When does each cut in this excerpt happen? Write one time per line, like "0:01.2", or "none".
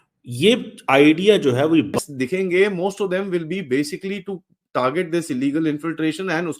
0:02.0